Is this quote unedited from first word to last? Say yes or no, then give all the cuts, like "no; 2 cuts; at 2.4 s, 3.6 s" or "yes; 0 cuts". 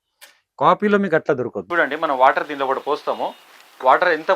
no; 1 cut; at 1.6 s